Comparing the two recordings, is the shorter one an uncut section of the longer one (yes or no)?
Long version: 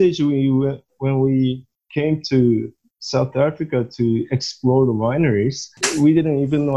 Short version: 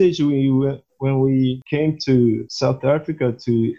no